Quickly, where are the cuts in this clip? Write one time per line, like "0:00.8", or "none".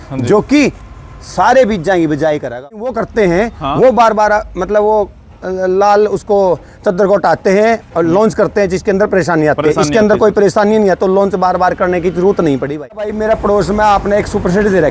0:03.0
0:13.1